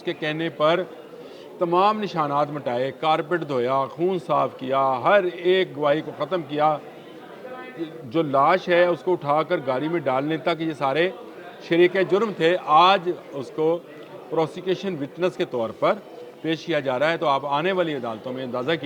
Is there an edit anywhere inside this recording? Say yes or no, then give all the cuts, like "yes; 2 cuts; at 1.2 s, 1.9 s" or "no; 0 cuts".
no; 0 cuts